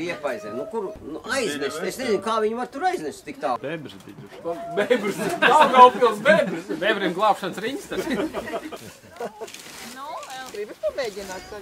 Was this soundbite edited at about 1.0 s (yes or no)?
yes